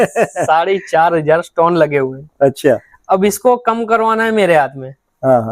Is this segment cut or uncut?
uncut